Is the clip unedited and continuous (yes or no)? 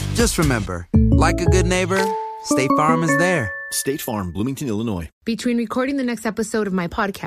no